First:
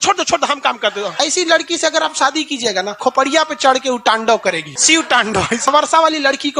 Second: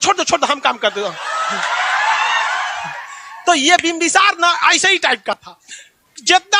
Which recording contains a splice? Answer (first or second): first